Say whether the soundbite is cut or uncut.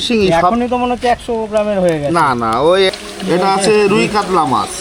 cut